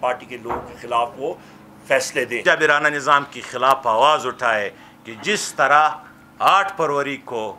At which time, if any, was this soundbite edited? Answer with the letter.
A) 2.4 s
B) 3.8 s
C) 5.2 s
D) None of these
A